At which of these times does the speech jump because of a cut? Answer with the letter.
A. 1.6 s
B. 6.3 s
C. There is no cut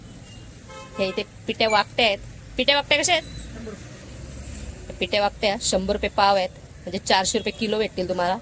C